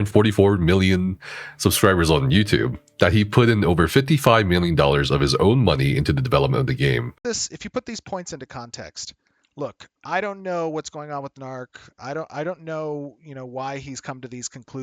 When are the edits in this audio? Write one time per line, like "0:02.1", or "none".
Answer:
0:07.1